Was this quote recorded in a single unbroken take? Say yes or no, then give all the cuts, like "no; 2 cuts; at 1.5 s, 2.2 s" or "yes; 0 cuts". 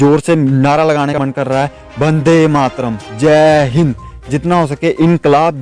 no; 1 cut; at 1.1 s